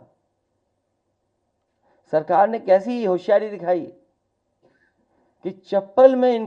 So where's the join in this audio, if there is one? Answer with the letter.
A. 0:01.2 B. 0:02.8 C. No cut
C